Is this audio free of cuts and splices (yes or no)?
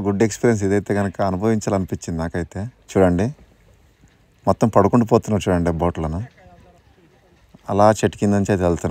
yes